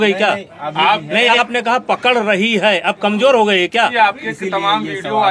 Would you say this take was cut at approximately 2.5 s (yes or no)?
no